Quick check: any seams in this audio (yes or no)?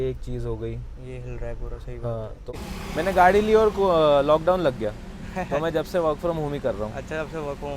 yes